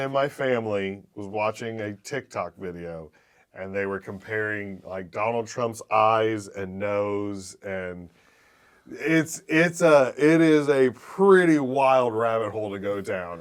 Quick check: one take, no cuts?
yes; 0 cuts

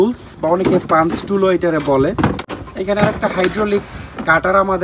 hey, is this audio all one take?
no; 1 cut; at 2.7 s

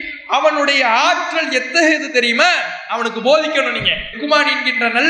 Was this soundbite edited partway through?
no; 0 cuts

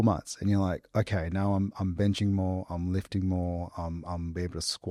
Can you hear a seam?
no; 0 cuts

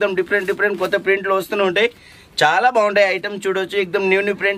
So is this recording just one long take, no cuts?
yes; 0 cuts

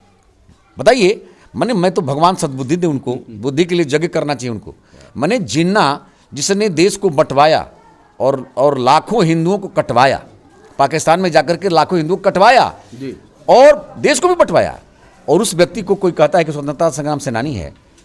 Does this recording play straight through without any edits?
yes; 0 cuts

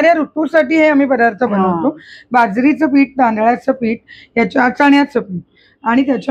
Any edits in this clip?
no; 0 cuts

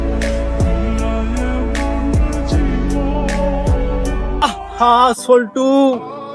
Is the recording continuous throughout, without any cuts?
no; 2 cuts; at 1.3 s, 4.3 s

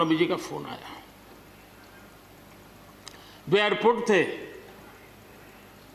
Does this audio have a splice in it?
no; 0 cuts

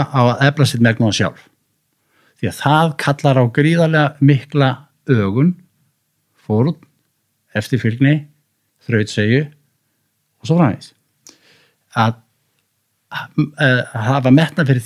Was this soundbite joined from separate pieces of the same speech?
no; 0 cuts

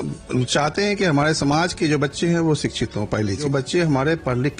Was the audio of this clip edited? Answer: yes; 1 cut; at 3.5 s

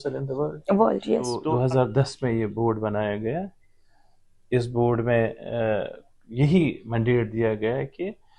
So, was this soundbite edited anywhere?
yes; 1 cut; at 1.4 s

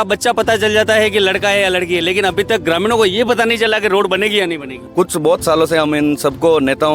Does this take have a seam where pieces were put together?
yes; 1 cut; at 4.7 s

